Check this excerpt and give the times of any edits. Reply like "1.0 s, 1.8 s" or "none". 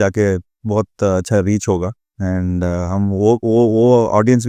2.1 s